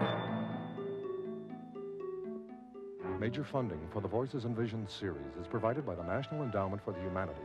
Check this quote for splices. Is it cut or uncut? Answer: uncut